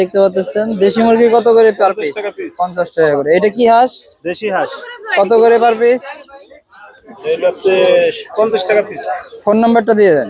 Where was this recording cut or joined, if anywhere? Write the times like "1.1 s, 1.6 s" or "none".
none